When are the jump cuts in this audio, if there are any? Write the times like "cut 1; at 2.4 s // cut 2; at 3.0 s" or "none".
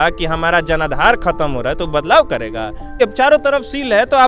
cut 1; at 3.0 s

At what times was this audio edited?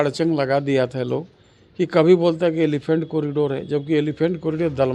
none

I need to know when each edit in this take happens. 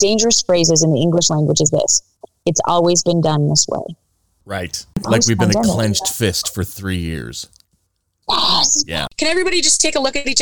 cut 1; at 5.0 s // cut 2; at 9.0 s

